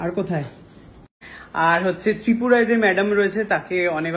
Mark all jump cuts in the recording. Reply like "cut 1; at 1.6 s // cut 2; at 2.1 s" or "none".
cut 1; at 1.2 s